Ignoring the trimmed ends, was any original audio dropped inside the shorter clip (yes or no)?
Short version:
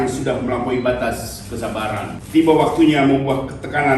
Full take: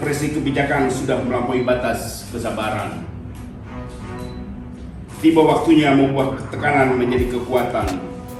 yes